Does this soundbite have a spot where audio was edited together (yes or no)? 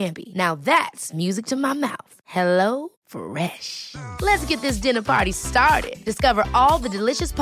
no